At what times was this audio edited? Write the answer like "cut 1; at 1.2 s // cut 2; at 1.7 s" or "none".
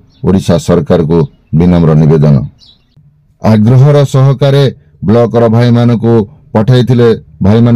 cut 1; at 3.0 s